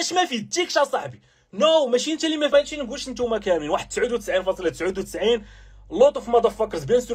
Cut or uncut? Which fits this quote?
cut